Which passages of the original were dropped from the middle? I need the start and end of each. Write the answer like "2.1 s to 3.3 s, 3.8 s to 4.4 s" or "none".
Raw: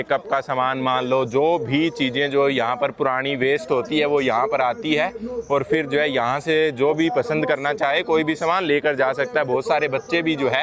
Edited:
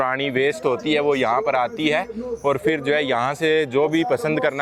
none